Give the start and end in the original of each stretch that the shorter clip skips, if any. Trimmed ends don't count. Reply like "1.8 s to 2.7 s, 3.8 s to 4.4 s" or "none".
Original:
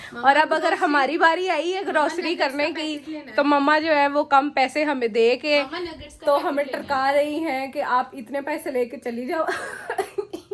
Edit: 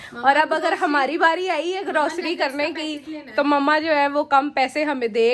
none